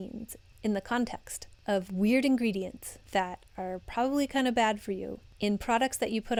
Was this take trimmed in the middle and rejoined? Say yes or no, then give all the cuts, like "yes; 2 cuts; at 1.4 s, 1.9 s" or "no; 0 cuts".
no; 0 cuts